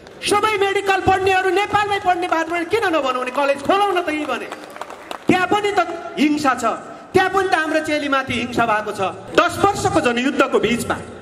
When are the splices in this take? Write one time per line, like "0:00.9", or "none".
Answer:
0:09.2